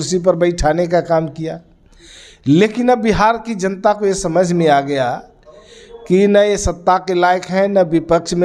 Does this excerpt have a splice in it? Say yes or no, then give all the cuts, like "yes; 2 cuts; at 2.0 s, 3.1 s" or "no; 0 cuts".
no; 0 cuts